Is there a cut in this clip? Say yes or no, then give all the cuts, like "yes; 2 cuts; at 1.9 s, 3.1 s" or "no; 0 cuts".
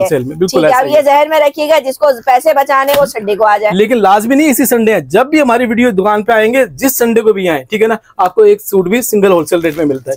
no; 0 cuts